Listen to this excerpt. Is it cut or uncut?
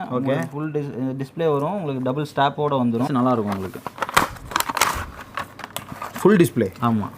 cut